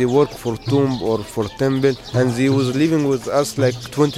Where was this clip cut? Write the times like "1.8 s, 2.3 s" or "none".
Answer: 2.0 s